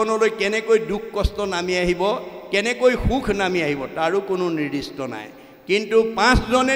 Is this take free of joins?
yes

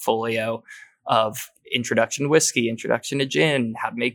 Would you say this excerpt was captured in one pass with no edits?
no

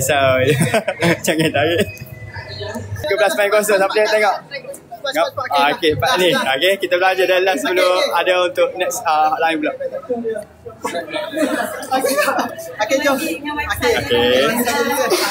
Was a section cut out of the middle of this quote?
yes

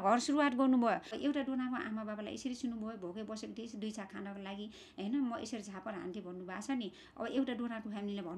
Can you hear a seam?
yes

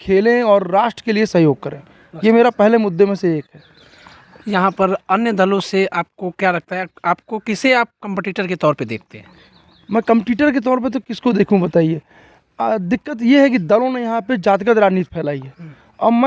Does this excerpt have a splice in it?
no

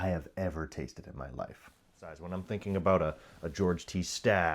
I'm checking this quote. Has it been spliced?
yes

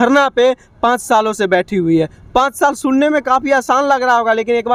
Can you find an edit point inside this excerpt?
no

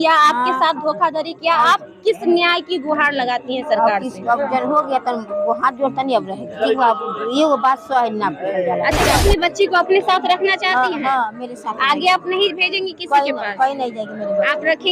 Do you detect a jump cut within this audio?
yes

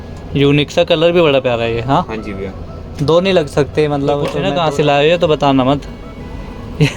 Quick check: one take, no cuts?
no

